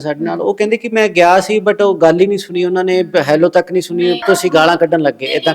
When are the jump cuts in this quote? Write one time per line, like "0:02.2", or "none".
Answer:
0:04.2